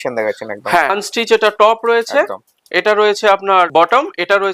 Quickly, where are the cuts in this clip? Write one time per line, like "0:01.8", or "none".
0:00.9
0:03.7